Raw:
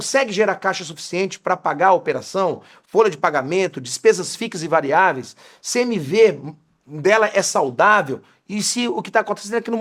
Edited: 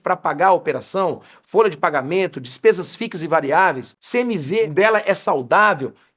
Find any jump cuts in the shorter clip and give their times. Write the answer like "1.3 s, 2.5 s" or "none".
4.2 s